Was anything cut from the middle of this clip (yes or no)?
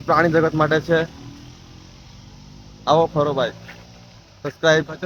no